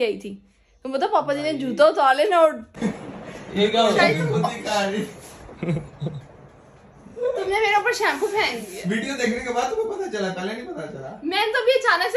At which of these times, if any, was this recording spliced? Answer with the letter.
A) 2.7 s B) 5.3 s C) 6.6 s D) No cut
A